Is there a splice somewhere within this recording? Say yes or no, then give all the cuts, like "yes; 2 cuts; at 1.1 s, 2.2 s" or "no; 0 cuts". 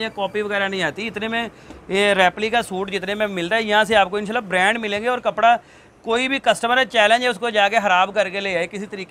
no; 0 cuts